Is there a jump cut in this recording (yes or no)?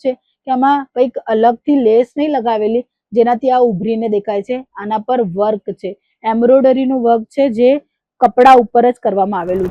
no